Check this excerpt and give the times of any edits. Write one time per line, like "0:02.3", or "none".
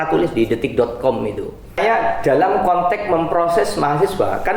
0:01.8